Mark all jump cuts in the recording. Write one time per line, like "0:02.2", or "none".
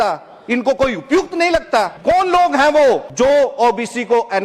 0:01.9
0:03.1